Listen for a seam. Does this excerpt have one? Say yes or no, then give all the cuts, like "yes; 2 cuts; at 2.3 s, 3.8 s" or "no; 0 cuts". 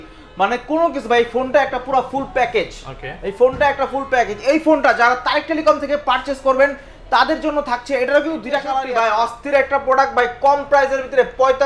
yes; 1 cut; at 8.7 s